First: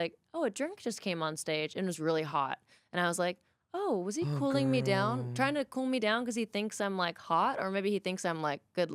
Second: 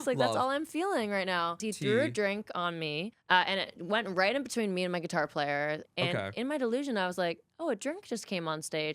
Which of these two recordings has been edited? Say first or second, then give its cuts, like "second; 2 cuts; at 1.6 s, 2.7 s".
second; 3 cuts; at 1.6 s, 3.1 s, 5.9 s